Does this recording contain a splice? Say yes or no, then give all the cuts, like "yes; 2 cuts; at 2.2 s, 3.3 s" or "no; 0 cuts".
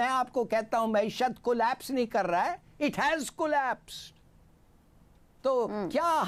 no; 0 cuts